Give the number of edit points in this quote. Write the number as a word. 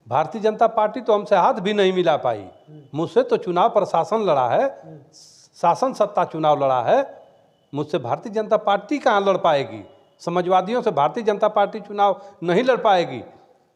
zero